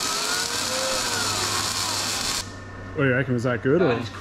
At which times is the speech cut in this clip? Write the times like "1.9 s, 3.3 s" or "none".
2.4 s